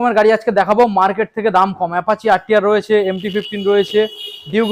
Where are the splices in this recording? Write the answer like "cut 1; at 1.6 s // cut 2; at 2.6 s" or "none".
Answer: none